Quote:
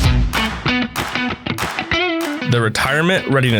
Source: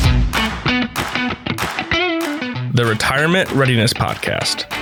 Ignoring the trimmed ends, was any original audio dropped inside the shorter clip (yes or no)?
yes